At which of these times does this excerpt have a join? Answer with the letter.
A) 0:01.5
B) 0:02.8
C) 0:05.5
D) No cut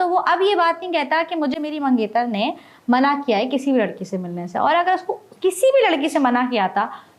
D